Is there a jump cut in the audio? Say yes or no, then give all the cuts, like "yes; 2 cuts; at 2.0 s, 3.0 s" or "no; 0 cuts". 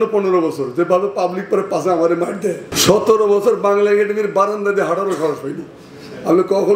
yes; 1 cut; at 2.7 s